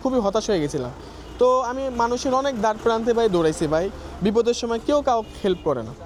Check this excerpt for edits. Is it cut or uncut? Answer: uncut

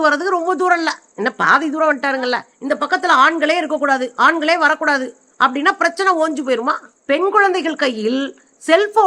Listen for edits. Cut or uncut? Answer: cut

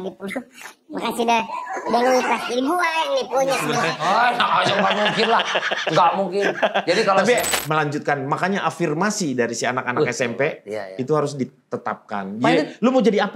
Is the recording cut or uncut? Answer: cut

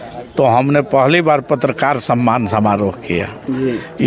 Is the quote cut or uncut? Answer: uncut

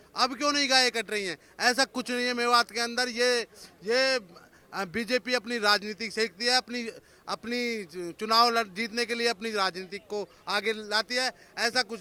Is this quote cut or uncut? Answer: uncut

